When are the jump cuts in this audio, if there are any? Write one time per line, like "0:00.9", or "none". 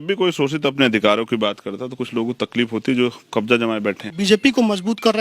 0:04.1